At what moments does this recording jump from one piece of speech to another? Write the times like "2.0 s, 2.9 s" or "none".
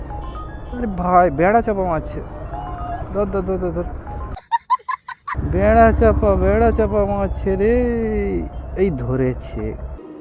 5.4 s